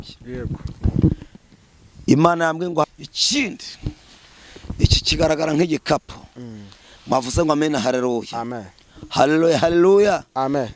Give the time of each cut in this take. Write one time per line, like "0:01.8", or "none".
0:02.8